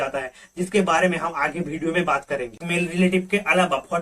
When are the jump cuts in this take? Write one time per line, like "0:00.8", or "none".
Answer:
0:02.6